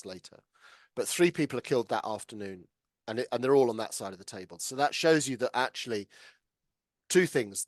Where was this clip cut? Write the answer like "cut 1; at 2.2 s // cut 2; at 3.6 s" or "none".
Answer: none